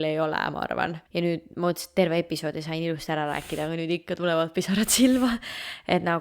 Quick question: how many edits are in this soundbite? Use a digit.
1